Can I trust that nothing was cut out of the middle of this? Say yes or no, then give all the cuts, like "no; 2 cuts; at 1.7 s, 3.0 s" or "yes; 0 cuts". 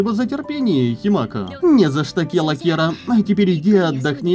no; 1 cut; at 1.4 s